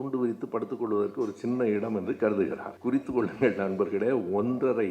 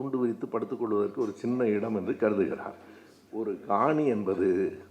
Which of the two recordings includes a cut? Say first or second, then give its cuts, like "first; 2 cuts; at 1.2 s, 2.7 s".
first; 1 cut; at 2.7 s